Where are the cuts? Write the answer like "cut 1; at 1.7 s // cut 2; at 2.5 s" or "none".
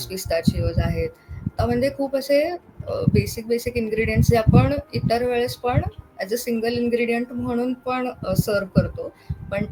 none